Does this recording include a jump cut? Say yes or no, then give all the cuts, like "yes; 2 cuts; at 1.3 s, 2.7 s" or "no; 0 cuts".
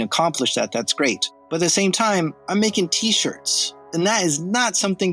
yes; 2 cuts; at 1.3 s, 3.8 s